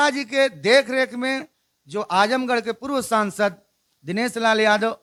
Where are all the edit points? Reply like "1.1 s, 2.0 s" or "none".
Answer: none